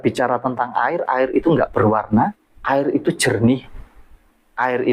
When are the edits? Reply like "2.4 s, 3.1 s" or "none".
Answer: 2.5 s

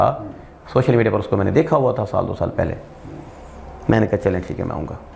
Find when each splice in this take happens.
none

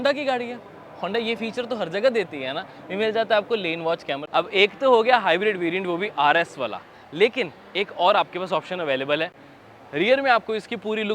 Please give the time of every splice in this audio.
4.2 s, 9.4 s

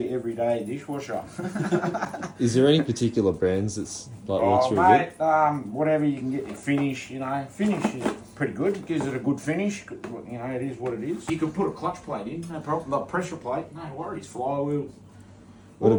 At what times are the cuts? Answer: none

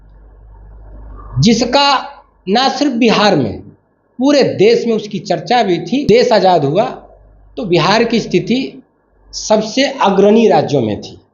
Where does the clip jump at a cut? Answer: 6.0 s

